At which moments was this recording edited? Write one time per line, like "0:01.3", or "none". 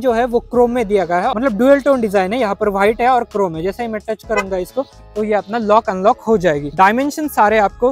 none